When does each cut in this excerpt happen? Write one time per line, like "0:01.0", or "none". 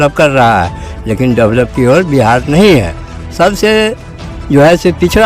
none